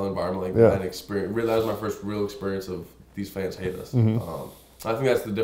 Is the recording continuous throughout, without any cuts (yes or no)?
yes